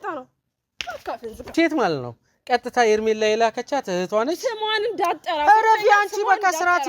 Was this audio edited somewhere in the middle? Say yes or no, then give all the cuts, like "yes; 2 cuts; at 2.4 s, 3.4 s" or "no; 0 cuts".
yes; 1 cut; at 1.5 s